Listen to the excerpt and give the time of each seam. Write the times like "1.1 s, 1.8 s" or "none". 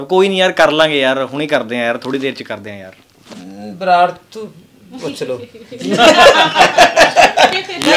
none